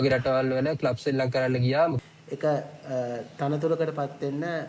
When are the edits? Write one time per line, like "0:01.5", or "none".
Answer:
0:02.0